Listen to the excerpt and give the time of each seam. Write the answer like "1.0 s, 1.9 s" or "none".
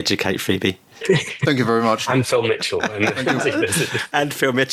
none